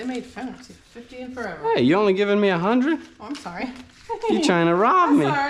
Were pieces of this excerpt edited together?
no; 0 cuts

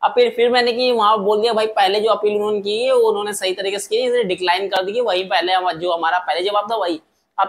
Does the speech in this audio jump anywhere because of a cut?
no; 0 cuts

